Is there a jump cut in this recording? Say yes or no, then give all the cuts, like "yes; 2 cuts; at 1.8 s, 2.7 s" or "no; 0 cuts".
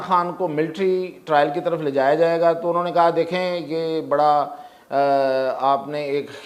no; 0 cuts